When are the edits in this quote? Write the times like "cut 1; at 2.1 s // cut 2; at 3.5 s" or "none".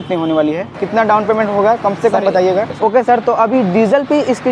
cut 1; at 0.8 s // cut 2; at 2.7 s